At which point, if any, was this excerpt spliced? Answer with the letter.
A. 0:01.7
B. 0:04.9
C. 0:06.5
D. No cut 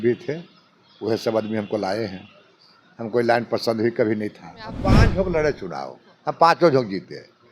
B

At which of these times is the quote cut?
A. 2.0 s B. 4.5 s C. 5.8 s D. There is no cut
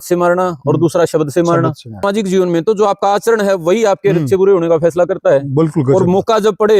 A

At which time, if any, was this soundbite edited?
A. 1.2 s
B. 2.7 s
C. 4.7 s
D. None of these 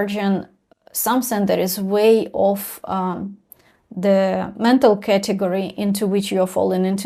D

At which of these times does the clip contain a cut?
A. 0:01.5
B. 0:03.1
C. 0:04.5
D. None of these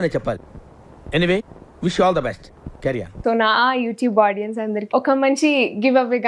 B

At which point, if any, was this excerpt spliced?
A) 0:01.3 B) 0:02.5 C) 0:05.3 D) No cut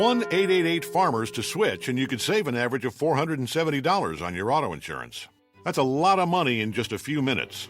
A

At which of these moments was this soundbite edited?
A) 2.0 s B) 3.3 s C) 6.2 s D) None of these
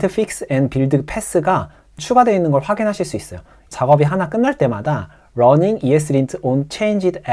A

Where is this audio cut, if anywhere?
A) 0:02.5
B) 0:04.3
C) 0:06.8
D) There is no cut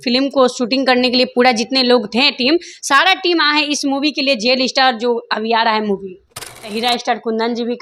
C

